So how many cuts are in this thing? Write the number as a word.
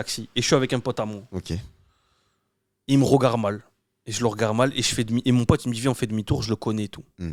zero